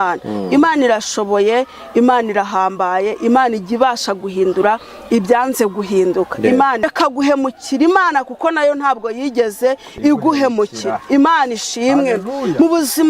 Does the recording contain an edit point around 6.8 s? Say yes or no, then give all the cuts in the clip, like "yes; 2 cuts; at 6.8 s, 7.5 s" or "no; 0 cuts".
yes; 1 cut; at 6.8 s